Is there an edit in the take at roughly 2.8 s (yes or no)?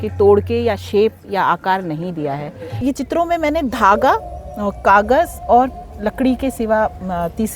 yes